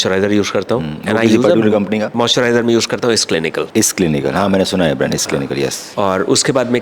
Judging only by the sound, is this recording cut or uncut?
uncut